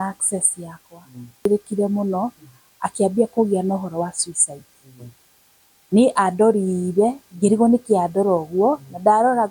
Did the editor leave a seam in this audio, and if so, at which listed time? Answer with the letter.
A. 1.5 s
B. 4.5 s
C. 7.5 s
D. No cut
A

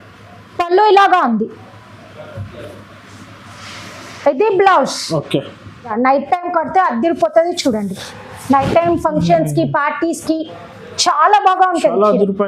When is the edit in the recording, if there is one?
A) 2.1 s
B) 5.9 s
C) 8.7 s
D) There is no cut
B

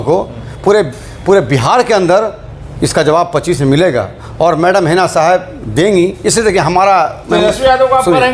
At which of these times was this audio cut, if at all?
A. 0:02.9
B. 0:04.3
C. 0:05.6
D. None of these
D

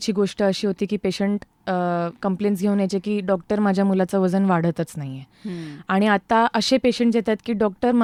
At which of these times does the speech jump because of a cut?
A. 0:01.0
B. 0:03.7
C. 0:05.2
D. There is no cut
D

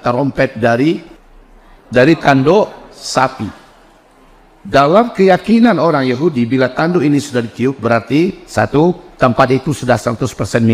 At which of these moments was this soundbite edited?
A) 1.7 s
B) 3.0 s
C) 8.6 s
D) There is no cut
A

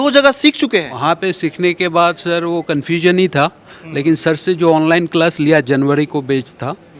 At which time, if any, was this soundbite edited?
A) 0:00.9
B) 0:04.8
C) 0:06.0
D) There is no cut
A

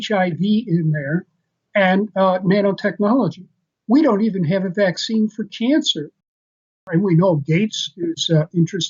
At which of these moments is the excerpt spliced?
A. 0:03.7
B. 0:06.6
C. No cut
B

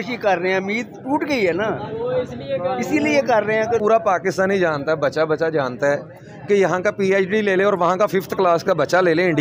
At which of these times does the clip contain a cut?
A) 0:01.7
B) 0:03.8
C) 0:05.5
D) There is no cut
B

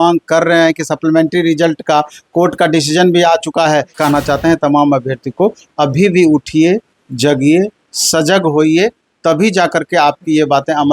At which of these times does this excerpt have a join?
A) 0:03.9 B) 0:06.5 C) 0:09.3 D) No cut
A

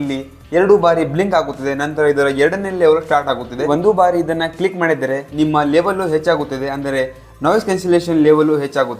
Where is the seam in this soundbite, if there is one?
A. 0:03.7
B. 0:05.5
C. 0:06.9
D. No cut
A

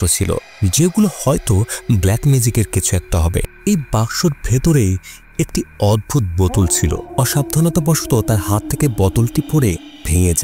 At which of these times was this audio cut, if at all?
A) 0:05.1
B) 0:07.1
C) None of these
B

